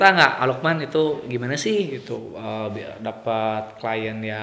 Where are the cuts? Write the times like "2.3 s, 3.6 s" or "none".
none